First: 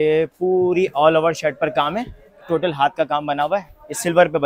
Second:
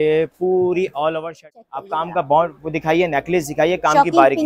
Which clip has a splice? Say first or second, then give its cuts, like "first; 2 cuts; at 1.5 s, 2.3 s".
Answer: second; 1 cut; at 1.5 s